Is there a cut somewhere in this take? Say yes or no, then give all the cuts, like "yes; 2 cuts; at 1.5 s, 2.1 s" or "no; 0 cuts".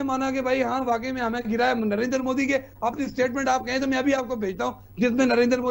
no; 0 cuts